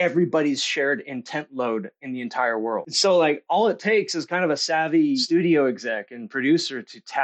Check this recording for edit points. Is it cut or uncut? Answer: cut